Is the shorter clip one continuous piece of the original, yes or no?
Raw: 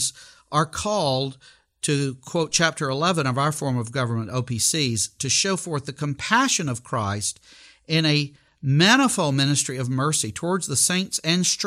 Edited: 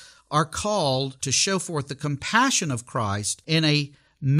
no